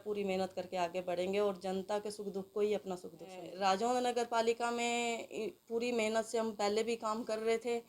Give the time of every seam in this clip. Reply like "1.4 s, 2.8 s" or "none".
3.5 s